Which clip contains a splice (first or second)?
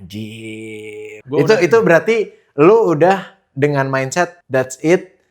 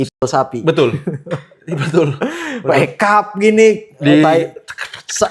first